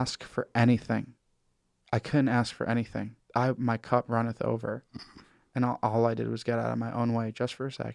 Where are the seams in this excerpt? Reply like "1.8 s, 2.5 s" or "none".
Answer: 3.2 s

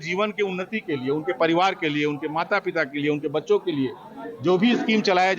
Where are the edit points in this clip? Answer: none

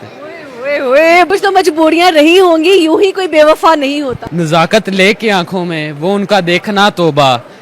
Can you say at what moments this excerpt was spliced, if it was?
1.3 s, 4.2 s

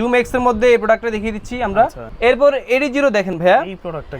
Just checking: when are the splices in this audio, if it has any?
2.0 s

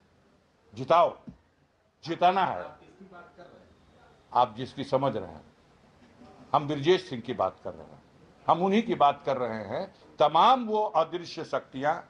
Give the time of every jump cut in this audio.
none

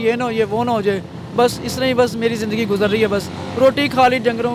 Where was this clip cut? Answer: none

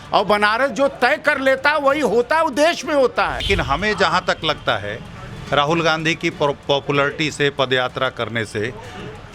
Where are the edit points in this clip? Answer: 3.4 s

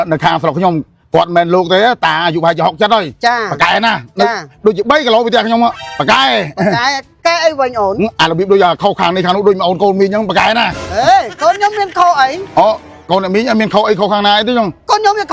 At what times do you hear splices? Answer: none

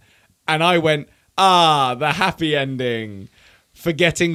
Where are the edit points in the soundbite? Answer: none

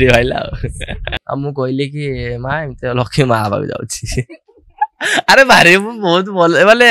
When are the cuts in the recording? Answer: 1.1 s

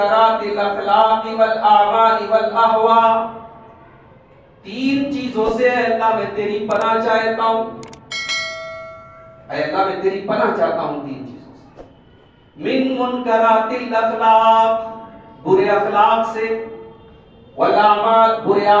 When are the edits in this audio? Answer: none

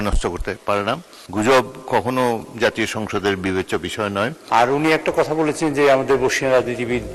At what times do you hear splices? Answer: 1.1 s, 4.4 s

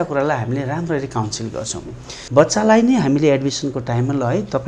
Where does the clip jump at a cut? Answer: 2.2 s

